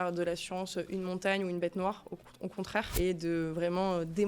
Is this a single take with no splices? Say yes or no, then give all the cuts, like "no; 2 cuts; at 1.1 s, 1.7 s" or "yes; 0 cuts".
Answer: no; 1 cut; at 2.9 s